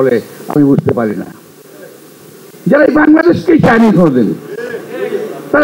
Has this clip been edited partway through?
no; 0 cuts

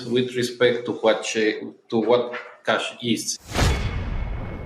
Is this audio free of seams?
no; 1 cut; at 3.3 s

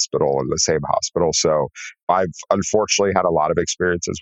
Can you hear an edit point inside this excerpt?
yes; 1 cut; at 2.1 s

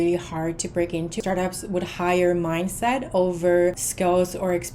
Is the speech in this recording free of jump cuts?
no; 2 cuts; at 1.2 s, 3.9 s

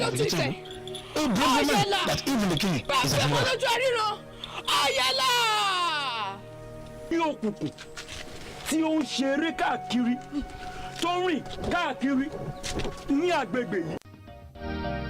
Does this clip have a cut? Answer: yes; 1 cut; at 14.0 s

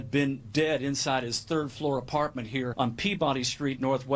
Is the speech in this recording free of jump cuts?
no; 1 cut; at 2.7 s

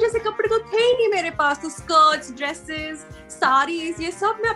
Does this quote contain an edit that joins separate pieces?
no; 0 cuts

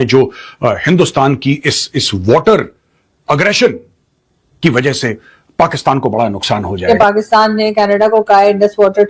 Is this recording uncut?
no; 1 cut; at 6.7 s

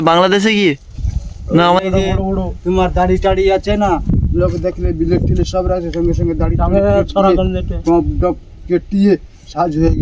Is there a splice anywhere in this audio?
yes; 1 cut; at 1.8 s

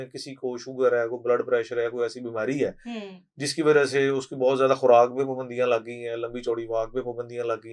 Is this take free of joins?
yes; 0 cuts

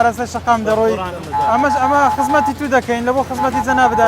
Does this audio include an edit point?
yes; 1 cut; at 1.1 s

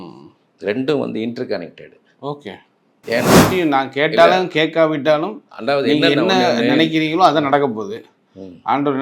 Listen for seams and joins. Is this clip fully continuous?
no; 1 cut; at 3.5 s

